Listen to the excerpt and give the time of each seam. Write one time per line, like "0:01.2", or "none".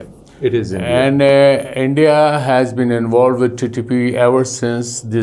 none